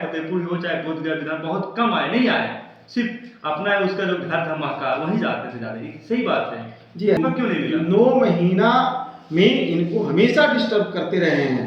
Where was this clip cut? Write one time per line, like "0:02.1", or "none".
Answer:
0:07.2